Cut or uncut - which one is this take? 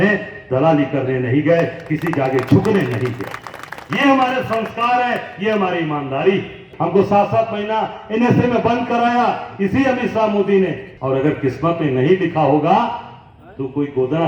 cut